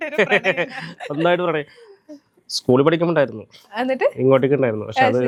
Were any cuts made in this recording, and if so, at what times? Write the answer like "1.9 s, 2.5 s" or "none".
none